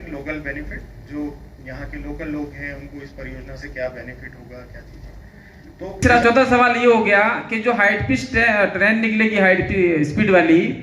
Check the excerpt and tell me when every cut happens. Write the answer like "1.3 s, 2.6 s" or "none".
6.0 s